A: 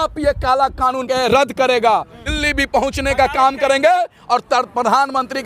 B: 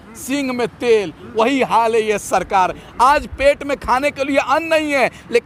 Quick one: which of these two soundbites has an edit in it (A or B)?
A